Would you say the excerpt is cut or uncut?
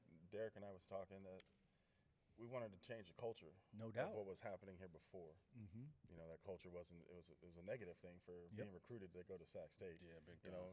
cut